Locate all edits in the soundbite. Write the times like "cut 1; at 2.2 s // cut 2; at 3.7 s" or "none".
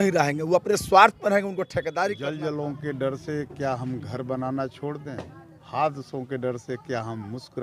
cut 1; at 2.1 s